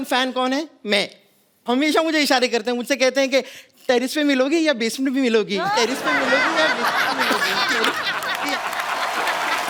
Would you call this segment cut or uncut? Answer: uncut